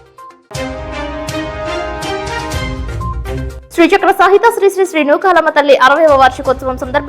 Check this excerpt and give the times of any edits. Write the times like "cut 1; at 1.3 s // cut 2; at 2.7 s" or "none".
none